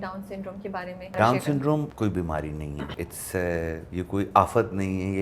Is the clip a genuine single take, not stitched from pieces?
no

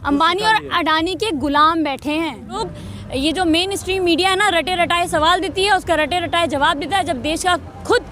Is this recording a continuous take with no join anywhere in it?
no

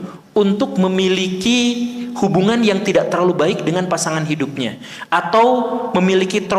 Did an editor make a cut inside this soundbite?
no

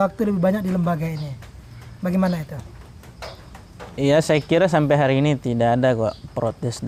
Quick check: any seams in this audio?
no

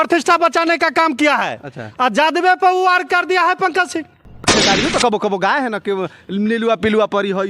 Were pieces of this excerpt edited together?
yes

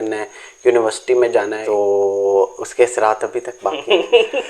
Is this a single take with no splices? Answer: no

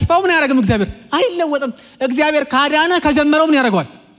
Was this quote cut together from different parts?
no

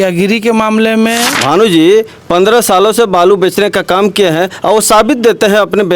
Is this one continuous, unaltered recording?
no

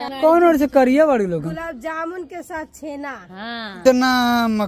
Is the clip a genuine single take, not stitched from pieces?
no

